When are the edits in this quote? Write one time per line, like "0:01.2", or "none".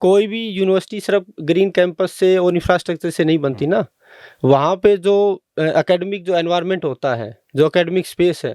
none